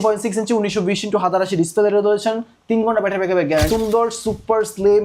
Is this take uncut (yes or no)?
no